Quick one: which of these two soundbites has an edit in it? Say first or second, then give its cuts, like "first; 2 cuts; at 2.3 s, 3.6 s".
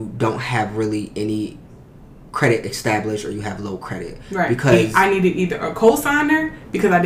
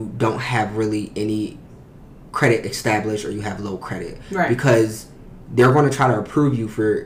first; 1 cut; at 4.9 s